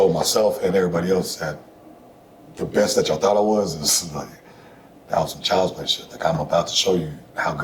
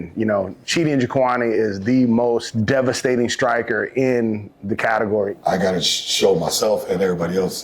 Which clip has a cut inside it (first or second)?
second